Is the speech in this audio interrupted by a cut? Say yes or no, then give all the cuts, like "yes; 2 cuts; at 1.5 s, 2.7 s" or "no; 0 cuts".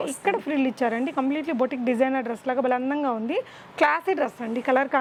no; 0 cuts